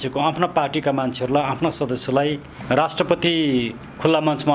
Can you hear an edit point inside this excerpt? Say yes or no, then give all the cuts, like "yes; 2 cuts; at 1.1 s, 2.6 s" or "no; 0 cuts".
yes; 1 cut; at 2.5 s